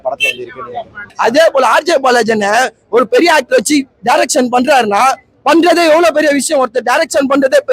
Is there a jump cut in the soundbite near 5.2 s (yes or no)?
no